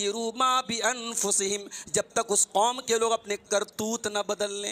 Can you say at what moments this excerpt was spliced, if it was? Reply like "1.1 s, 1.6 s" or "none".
none